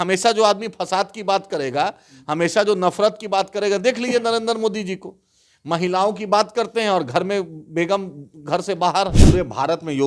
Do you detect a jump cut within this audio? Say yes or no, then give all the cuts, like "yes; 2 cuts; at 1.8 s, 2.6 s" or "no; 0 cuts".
yes; 1 cut; at 9.2 s